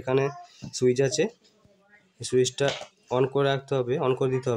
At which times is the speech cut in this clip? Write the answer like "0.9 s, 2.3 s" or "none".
none